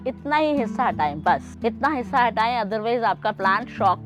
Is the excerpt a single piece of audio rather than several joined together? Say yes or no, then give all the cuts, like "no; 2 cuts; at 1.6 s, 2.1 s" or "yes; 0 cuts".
yes; 0 cuts